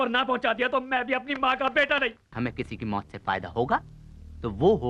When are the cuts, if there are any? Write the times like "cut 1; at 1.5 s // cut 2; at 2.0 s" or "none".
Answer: cut 1; at 2.3 s